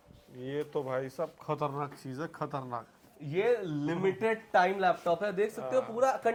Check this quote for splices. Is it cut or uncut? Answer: uncut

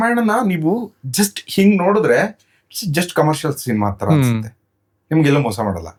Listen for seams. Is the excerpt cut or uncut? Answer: uncut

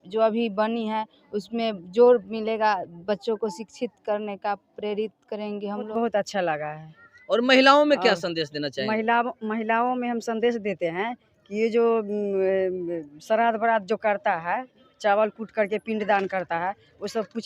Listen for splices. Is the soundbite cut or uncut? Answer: cut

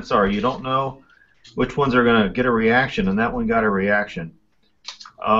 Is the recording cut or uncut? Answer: cut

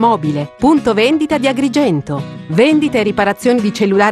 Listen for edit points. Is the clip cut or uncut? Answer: cut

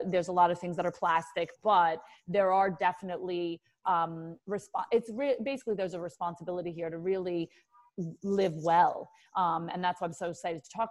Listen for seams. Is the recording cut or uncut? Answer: uncut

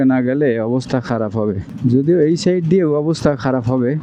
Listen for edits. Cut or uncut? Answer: uncut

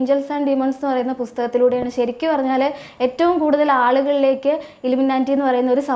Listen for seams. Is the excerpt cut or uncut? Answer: uncut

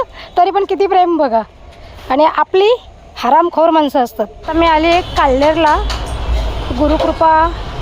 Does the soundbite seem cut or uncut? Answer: cut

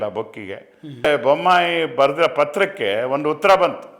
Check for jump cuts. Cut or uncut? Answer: cut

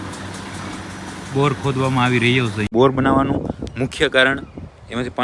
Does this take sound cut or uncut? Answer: cut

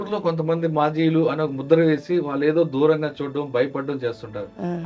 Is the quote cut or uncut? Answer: uncut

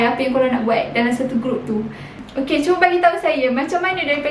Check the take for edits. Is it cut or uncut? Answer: cut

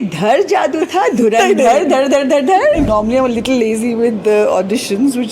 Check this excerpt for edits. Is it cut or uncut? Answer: cut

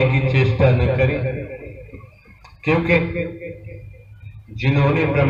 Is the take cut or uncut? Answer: uncut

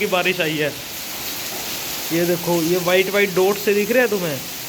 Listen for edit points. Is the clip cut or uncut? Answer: uncut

